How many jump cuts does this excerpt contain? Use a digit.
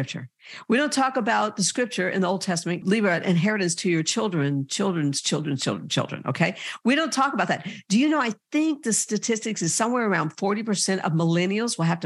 1